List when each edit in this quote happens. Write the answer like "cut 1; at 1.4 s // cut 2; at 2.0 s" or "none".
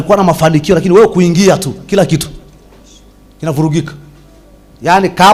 none